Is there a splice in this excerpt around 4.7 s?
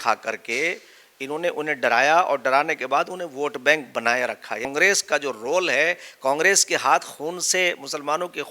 yes; 1 cut; at 4.7 s

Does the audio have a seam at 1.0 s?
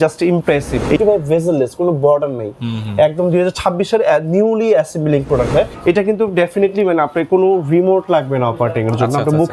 yes; 2 cuts; at 1.0 s, 5.7 s

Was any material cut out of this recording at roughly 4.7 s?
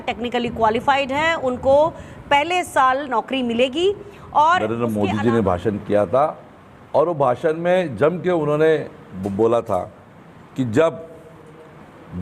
yes; 1 cut; at 4.7 s

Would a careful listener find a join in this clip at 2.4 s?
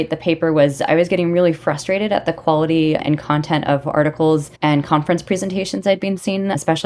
no; 1 cut; at 4.5 s

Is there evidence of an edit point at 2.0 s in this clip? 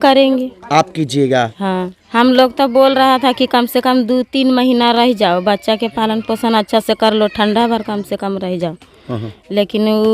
yes; 1 cut; at 2.0 s

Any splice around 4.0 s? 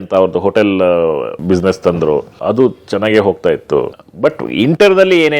yes; 3 cuts; at 1.3 s, 2.3 s, 4.0 s

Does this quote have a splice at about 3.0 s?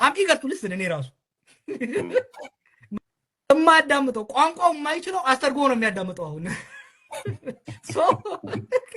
yes; 1 cut; at 3.0 s

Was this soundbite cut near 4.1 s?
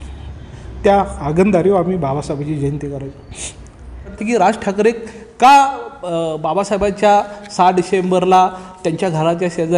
yes; 1 cut; at 4.1 s

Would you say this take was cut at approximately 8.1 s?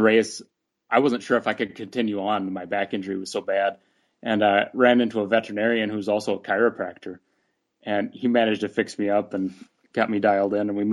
no; 0 cuts

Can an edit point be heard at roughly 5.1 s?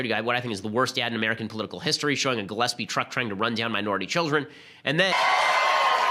no; 0 cuts

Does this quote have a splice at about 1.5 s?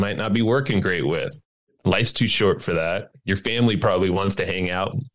yes; 1 cut; at 1.5 s

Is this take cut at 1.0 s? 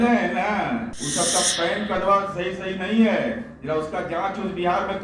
yes; 1 cut; at 1.0 s

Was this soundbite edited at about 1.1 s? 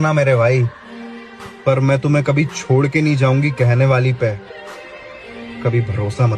no; 0 cuts

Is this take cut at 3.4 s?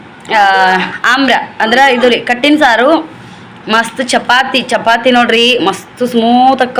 no; 0 cuts

